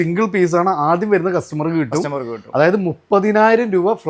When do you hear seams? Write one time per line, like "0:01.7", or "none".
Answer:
none